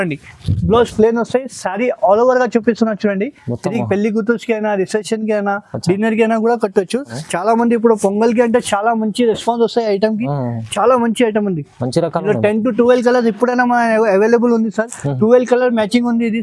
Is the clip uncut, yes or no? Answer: no